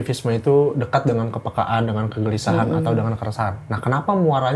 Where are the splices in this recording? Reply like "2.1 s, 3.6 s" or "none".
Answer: none